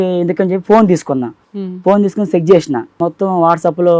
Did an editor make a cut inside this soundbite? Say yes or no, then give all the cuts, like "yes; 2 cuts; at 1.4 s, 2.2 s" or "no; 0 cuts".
yes; 2 cuts; at 1.4 s, 3.0 s